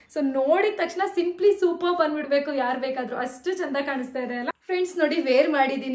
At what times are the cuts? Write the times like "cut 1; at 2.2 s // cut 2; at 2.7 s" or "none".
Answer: cut 1; at 4.6 s